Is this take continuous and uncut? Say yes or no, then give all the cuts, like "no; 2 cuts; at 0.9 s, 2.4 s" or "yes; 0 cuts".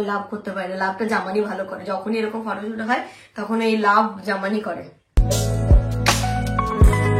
yes; 0 cuts